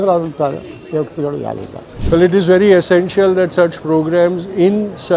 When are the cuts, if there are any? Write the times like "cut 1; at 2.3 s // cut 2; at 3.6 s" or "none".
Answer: cut 1; at 2.0 s